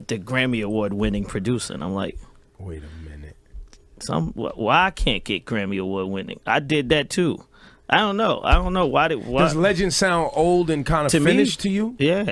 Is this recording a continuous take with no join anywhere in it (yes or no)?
yes